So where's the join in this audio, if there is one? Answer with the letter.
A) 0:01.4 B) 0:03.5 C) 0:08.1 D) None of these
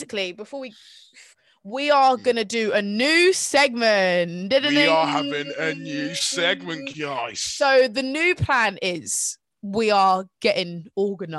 A